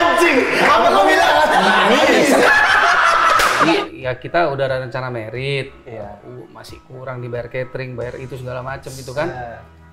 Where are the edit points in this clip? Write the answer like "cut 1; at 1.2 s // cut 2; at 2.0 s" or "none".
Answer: cut 1; at 3.7 s

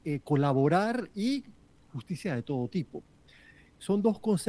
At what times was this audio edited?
none

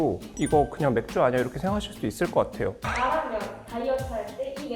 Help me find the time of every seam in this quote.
cut 1; at 2.9 s

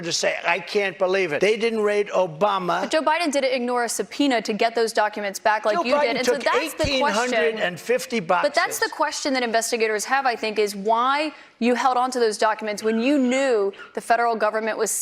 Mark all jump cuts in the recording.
cut 1; at 1.3 s

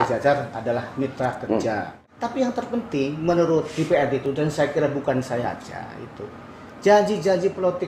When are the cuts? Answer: cut 1; at 2.0 s

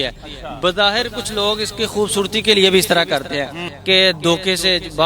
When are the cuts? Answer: cut 1; at 3.7 s

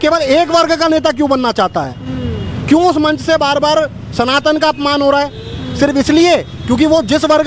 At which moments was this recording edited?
none

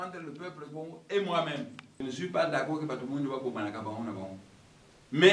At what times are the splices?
cut 1; at 2.0 s

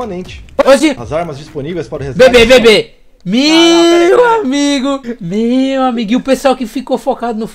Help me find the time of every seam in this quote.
none

